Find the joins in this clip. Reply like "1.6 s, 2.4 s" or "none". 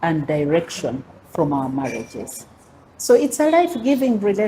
none

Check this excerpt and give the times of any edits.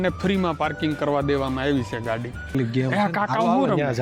2.5 s

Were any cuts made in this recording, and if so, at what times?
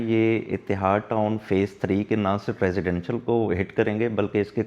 none

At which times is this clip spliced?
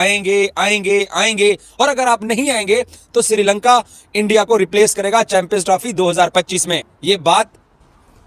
none

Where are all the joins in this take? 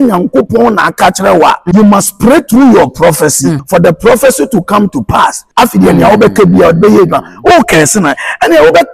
1.6 s, 3.6 s, 5.4 s

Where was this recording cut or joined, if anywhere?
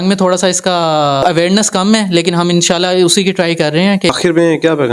1.2 s, 4.1 s

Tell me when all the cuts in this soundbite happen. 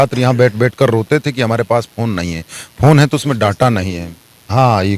none

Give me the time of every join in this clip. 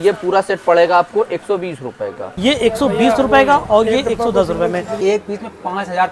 2.3 s, 4.9 s

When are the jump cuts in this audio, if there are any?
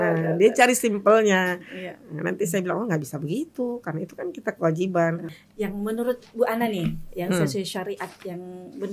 5.3 s

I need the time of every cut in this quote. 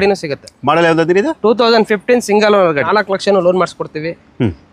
2.9 s

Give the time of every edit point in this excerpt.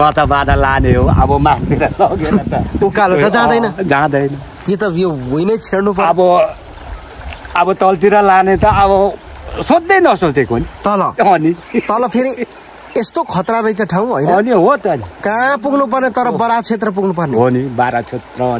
none

